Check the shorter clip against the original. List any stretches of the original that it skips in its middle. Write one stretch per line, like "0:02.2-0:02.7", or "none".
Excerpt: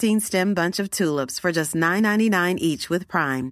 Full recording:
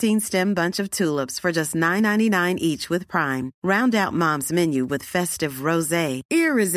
none